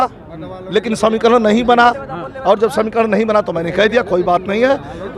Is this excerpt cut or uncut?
uncut